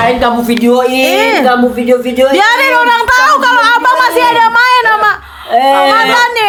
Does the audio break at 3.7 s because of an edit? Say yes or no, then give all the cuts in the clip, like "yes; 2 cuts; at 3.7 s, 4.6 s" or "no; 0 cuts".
no; 0 cuts